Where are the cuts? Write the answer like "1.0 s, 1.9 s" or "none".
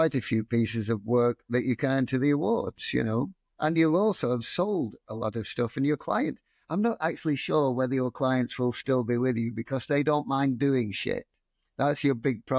none